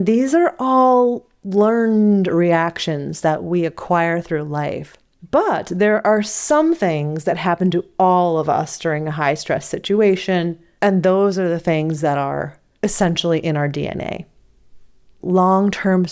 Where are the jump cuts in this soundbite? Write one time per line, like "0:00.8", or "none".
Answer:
0:15.2